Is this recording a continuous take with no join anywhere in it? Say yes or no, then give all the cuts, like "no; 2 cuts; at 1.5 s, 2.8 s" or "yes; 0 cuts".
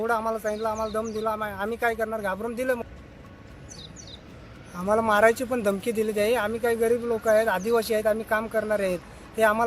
no; 1 cut; at 2.8 s